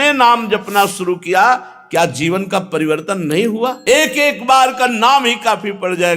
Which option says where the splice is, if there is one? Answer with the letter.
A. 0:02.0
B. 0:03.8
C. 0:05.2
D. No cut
B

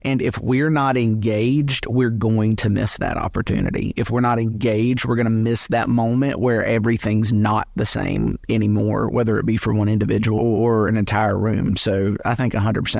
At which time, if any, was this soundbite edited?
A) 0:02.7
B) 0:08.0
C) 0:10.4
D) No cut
C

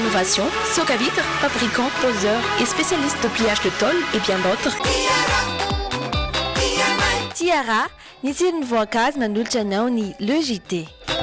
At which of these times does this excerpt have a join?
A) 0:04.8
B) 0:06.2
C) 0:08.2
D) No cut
A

